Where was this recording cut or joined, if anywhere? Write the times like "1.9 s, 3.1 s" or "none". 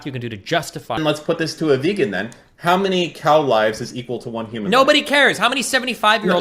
1.0 s